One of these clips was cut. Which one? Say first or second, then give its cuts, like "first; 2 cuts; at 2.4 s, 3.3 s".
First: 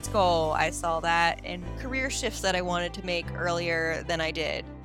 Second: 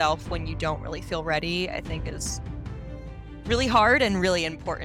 first; 1 cut; at 1.6 s